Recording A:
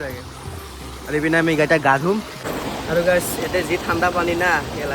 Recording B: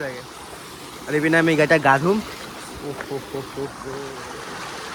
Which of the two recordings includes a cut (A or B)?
A